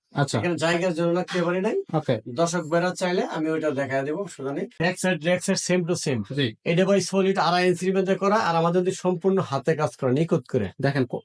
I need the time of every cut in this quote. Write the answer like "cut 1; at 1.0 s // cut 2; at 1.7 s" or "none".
cut 1; at 4.7 s